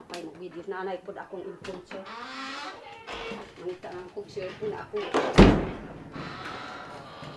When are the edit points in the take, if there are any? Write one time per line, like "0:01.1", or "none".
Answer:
none